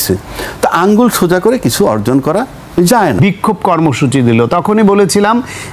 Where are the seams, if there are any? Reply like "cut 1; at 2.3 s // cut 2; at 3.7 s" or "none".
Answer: cut 1; at 3.2 s